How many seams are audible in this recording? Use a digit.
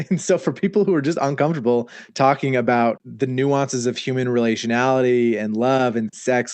1